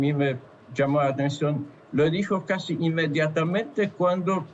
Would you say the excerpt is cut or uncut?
uncut